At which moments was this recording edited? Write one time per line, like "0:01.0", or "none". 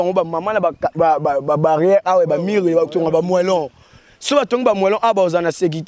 none